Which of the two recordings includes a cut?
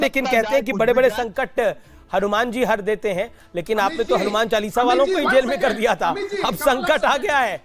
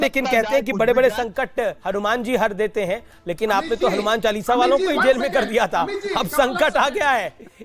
second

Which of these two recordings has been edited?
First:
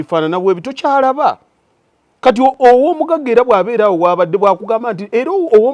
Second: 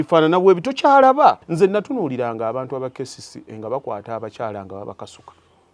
second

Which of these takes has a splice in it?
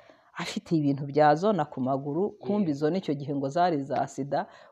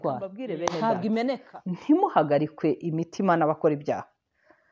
second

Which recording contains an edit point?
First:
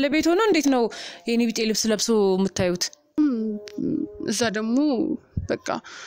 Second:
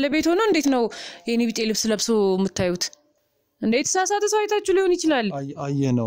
first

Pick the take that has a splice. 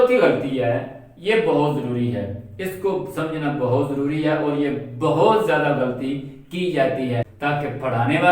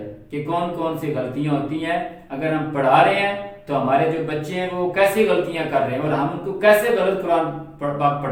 first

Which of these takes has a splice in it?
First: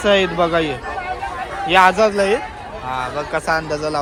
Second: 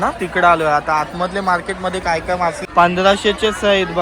second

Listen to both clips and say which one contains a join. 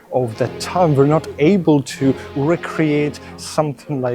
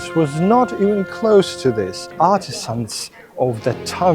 second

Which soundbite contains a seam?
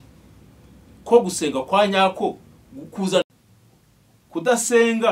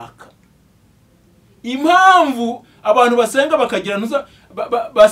first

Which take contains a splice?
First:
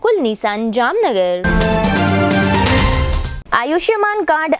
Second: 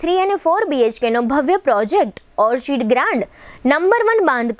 first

